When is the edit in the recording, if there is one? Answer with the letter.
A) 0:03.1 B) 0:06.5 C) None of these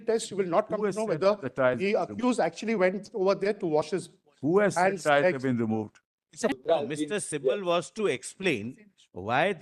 B